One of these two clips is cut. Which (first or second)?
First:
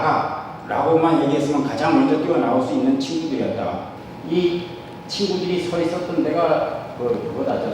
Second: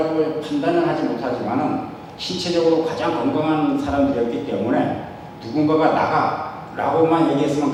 first